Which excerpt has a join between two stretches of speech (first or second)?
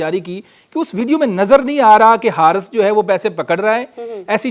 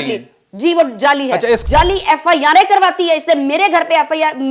second